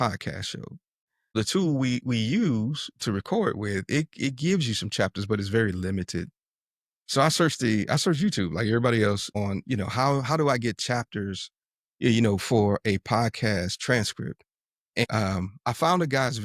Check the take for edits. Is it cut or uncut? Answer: cut